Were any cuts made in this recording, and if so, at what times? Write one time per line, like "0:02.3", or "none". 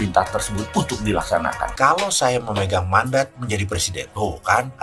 0:01.7